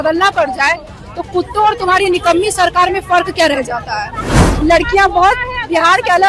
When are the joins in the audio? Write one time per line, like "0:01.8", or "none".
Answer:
0:04.5